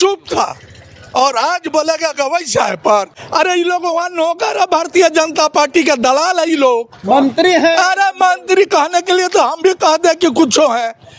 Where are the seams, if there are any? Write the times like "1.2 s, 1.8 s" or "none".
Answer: 3.1 s